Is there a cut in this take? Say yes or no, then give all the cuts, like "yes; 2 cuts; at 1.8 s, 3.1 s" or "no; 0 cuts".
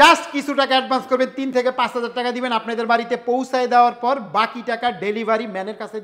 no; 0 cuts